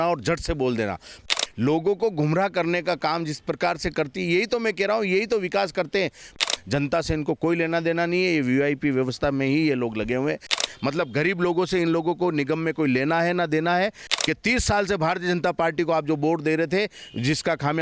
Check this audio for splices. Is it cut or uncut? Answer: cut